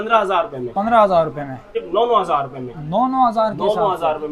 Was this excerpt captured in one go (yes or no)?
no